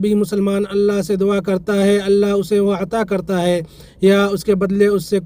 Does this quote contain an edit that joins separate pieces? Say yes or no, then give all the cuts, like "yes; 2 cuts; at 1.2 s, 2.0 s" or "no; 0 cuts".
no; 0 cuts